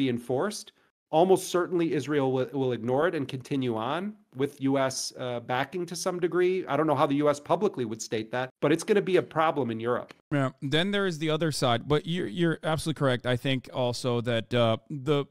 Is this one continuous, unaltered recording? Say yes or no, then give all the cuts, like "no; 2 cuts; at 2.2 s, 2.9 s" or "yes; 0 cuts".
yes; 0 cuts